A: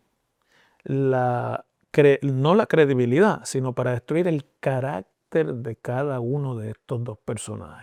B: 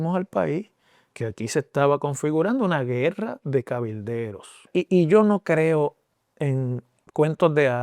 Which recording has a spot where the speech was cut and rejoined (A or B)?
B